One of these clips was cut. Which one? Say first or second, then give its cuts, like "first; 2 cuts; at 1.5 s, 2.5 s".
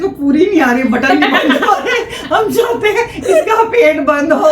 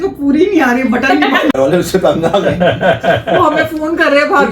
second; 1 cut; at 1.5 s